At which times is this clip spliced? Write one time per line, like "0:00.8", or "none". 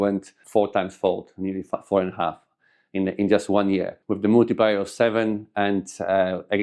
none